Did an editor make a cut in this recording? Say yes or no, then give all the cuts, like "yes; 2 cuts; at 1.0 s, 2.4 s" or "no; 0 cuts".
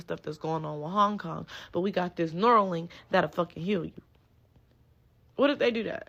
no; 0 cuts